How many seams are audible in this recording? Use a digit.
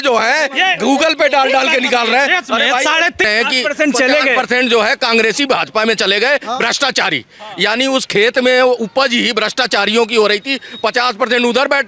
1